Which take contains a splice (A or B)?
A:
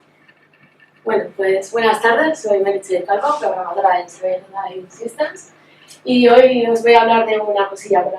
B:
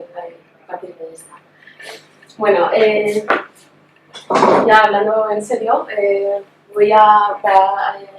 B